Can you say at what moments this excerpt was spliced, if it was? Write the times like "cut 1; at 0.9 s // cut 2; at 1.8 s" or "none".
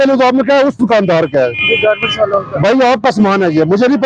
none